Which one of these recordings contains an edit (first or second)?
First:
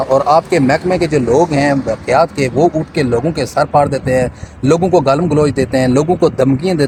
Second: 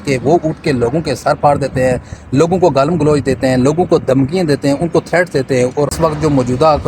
second